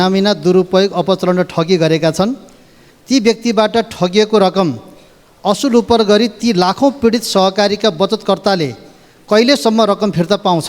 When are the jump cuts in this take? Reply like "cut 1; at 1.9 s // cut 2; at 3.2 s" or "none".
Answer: none